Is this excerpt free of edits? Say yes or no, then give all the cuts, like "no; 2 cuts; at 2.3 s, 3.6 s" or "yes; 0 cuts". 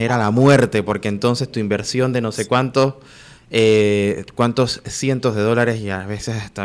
yes; 0 cuts